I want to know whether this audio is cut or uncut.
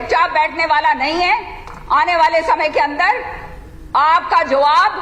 uncut